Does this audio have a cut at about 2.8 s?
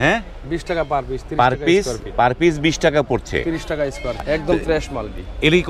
no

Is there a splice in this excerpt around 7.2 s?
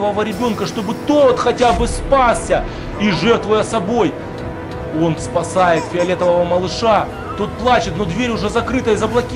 no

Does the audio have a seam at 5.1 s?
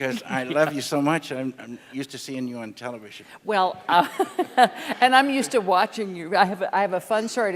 yes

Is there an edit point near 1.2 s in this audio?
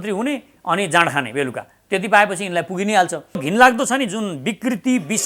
no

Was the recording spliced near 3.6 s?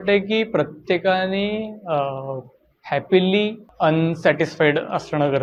yes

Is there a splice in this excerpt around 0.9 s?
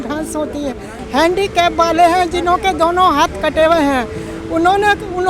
yes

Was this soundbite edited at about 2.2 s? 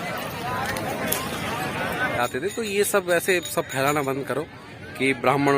yes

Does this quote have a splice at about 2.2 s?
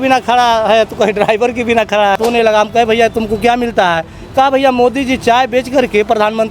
yes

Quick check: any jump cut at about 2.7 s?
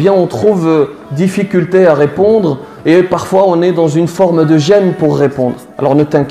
no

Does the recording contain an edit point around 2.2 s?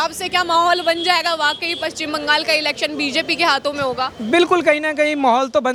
no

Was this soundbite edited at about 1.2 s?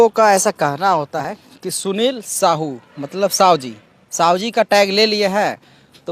yes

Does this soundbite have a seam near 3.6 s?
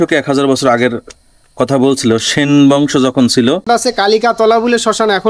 yes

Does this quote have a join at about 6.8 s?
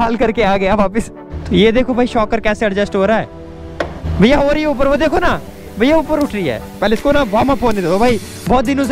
yes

